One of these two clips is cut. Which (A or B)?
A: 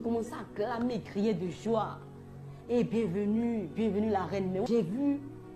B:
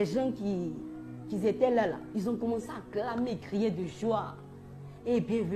A